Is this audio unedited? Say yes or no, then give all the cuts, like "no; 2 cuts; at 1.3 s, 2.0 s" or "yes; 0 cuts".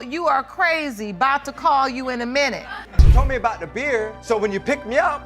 no; 1 cut; at 2.9 s